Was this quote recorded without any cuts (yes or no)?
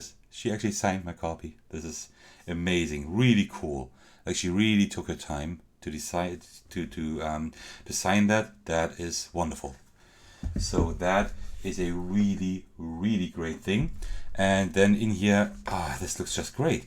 yes